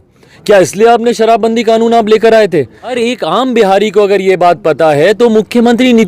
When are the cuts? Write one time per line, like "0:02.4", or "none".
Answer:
0:03.0